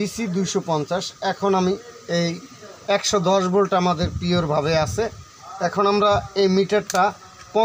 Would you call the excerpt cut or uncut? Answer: uncut